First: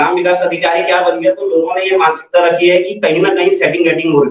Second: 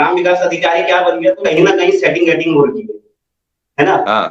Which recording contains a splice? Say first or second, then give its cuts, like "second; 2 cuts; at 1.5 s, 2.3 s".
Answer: second; 1 cut; at 1.4 s